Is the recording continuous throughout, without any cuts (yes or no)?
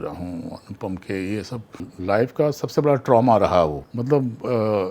no